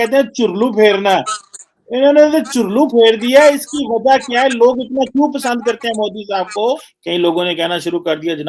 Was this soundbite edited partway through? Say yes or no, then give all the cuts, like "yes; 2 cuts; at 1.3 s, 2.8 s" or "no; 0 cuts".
yes; 1 cut; at 6.9 s